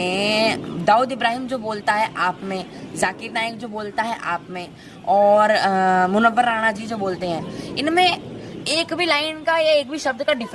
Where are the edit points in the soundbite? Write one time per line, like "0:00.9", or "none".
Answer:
none